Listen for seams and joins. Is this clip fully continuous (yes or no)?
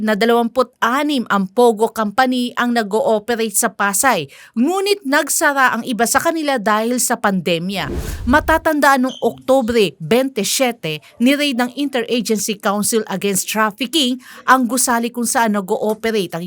no